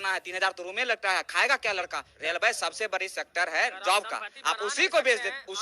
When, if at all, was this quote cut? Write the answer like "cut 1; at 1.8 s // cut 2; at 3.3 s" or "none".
cut 1; at 2.1 s